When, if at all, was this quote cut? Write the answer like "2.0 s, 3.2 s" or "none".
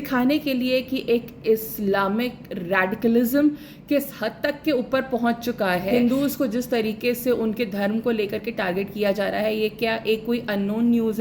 5.9 s